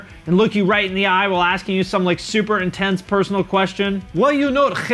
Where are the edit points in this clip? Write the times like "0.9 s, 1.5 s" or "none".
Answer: none

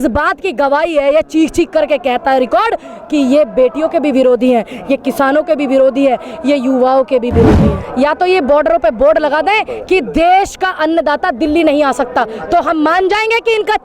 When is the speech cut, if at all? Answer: 7.8 s

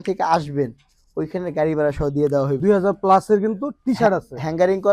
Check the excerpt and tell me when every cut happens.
2.6 s

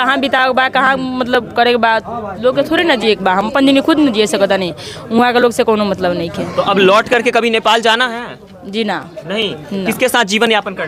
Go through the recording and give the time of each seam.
none

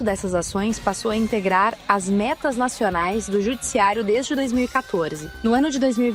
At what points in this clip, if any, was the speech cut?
none

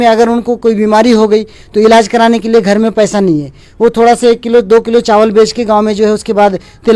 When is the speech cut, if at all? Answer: none

